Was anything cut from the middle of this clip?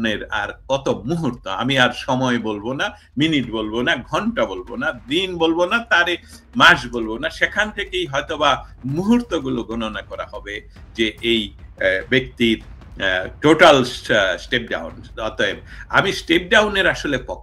no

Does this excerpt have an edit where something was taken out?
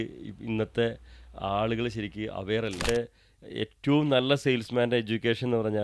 yes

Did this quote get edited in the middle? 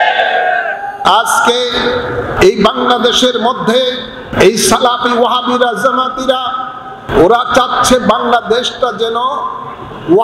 yes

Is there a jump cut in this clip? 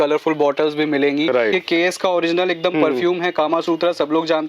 yes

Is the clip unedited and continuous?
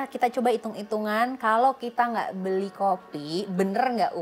yes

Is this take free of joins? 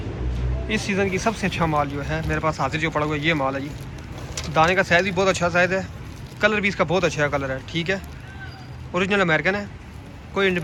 yes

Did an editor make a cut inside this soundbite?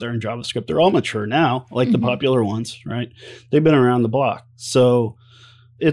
no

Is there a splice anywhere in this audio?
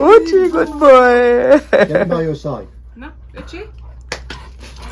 no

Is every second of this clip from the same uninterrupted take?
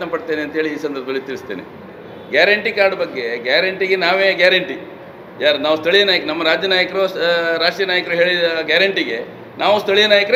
no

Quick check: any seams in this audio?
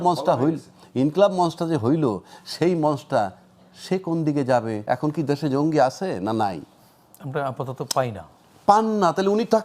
yes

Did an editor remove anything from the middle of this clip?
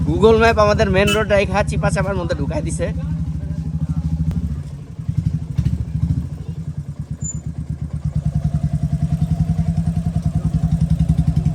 no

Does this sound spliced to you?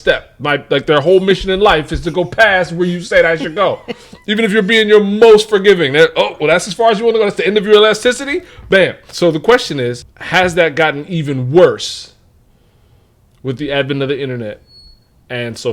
yes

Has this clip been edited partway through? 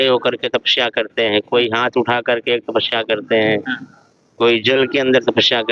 no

